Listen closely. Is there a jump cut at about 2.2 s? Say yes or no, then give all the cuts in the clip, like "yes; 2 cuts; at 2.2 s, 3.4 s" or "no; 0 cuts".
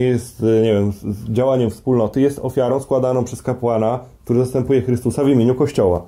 no; 0 cuts